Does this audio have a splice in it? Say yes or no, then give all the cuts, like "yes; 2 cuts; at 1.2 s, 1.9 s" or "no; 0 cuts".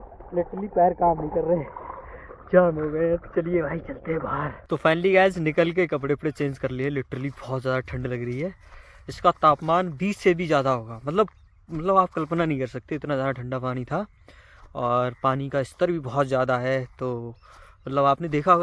no; 0 cuts